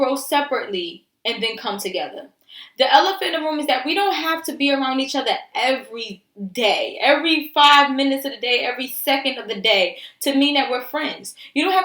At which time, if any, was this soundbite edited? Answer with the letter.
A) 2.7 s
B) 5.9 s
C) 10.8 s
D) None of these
D